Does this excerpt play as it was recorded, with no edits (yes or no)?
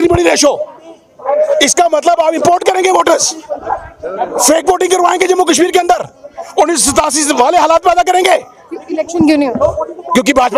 yes